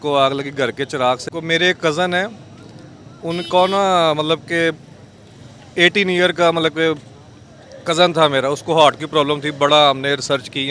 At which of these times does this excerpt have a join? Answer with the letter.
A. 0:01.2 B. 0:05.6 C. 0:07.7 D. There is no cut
A